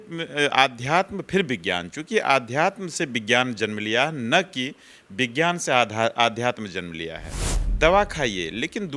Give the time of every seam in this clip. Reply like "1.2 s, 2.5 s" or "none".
none